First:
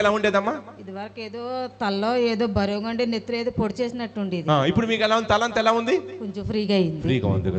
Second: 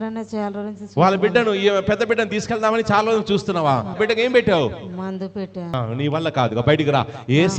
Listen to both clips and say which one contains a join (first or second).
second